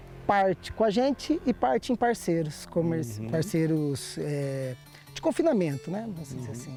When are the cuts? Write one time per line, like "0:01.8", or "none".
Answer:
none